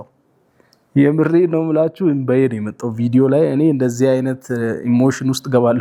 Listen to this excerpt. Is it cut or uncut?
uncut